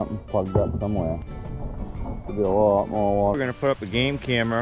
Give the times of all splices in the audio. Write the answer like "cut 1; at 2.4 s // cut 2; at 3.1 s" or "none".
cut 1; at 3.3 s